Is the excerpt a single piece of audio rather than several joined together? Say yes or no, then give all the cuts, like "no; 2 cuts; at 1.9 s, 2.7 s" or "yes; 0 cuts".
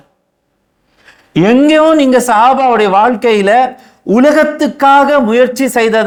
yes; 0 cuts